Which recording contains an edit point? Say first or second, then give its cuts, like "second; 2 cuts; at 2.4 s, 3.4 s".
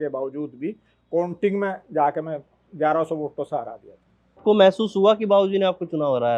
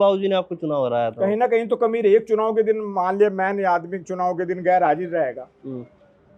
first; 1 cut; at 4.4 s